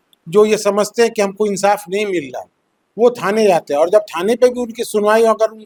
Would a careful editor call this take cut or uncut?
uncut